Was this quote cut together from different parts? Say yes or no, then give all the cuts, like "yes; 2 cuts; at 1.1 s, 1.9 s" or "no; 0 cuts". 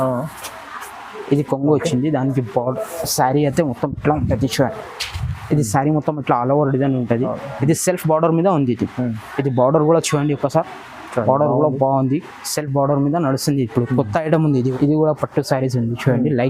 yes; 1 cut; at 14.7 s